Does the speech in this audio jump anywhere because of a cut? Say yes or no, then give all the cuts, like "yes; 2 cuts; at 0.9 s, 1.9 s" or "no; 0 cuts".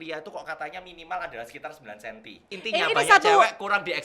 yes; 1 cut; at 2.5 s